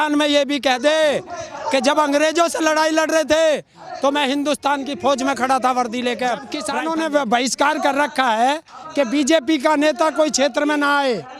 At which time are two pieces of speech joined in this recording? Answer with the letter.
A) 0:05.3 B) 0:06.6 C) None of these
B